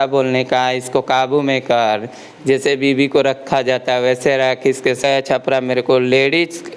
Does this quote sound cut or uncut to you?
cut